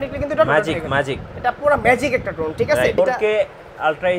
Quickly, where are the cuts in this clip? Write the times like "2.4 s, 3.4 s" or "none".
3.0 s